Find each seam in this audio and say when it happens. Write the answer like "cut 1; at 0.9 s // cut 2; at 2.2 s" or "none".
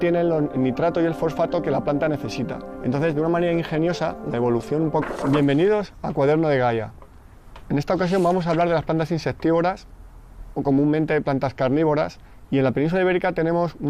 none